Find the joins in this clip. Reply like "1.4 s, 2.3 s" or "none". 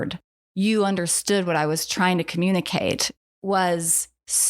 3.1 s